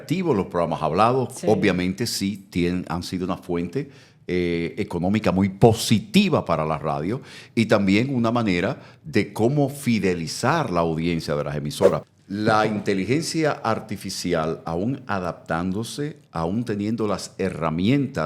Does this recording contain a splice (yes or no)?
yes